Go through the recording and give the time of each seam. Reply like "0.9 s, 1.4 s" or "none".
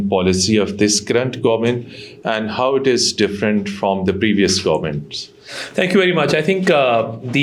none